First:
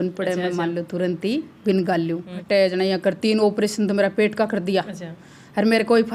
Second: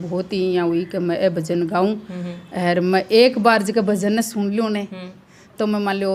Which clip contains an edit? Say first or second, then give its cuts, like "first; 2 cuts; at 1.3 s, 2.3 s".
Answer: first; 1 cut; at 2.3 s